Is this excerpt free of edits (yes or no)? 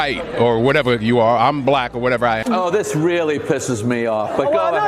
no